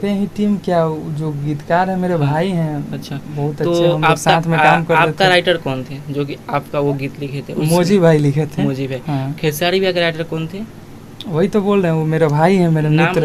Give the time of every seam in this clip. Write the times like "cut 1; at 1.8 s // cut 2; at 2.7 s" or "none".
none